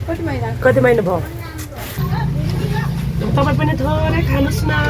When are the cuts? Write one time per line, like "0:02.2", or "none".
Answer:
0:02.0